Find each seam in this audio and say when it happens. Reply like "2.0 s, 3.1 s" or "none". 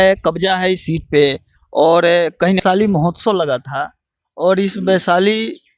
2.6 s